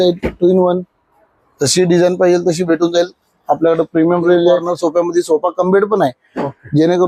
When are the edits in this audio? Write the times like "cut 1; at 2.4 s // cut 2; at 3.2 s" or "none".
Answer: cut 1; at 4.7 s